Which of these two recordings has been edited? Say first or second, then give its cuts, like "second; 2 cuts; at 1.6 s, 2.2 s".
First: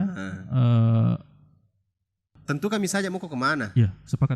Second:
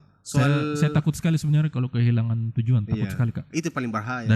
first; 1 cut; at 2.4 s